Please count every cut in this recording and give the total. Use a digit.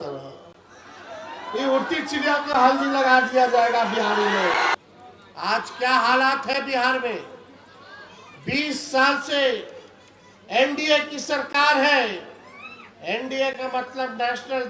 1